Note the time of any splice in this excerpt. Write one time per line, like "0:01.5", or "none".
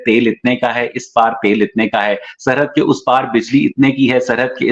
none